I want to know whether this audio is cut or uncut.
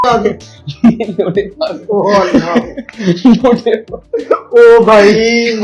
uncut